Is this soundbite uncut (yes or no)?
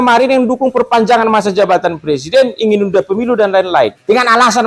yes